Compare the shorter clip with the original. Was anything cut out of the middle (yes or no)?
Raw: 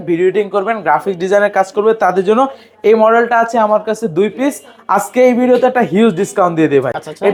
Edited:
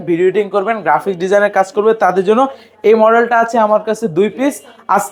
no